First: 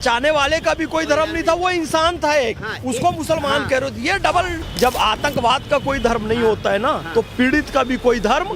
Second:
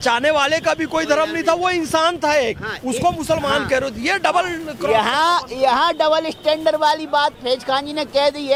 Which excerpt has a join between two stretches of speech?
first; 1 cut; at 4.6 s

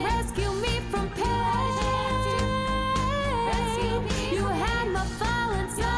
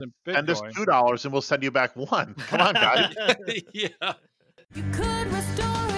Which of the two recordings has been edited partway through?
second; 1 cut; at 4.8 s

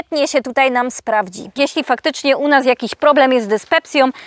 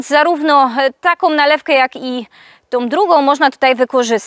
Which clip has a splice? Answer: first; 1 cut; at 1.5 s

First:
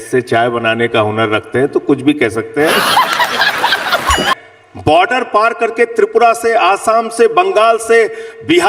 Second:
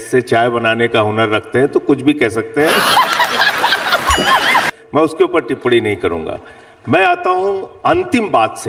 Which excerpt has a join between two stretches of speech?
first; 1 cut; at 4.3 s

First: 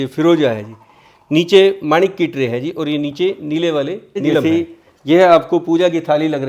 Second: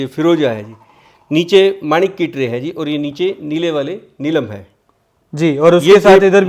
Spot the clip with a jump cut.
first; 1 cut; at 4.4 s

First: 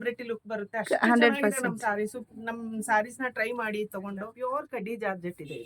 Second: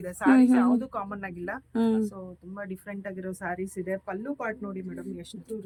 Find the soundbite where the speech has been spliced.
first; 1 cut; at 4.3 s

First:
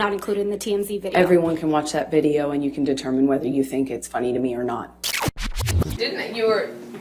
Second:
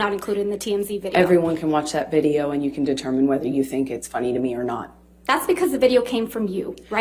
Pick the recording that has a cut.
second; 1 cut; at 5.1 s

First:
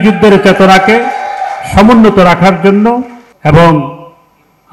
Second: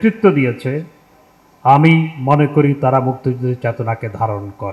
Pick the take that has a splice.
first; 1 cut; at 3.2 s

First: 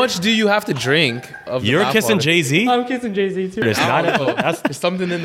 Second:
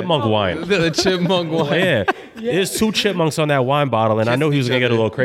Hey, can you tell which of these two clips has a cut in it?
first; 1 cut; at 3.6 s

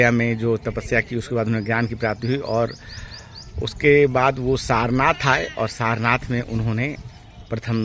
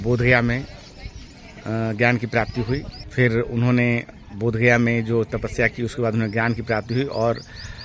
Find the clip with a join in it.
second; 1 cut; at 3.0 s

